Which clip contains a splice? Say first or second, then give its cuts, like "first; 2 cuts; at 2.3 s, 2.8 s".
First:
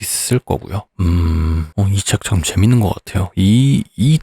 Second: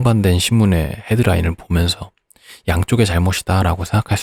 first; 2 cuts; at 0.9 s, 1.7 s